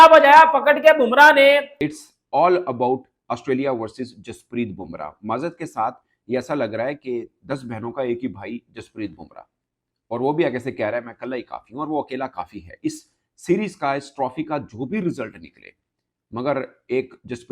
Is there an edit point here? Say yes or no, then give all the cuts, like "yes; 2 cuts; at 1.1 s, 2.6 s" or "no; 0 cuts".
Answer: yes; 1 cut; at 1.7 s